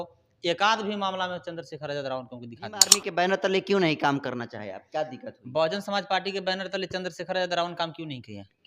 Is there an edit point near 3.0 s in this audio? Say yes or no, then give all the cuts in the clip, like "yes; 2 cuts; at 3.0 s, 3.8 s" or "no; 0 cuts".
yes; 1 cut; at 3.0 s